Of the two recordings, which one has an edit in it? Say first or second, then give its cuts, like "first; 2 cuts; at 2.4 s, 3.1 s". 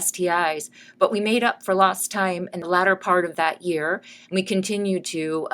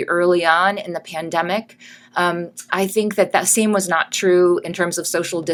first; 1 cut; at 2.5 s